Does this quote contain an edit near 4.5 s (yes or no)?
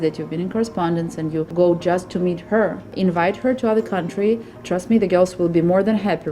yes